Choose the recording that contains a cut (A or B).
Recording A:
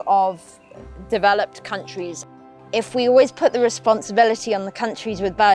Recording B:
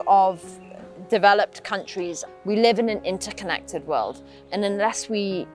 A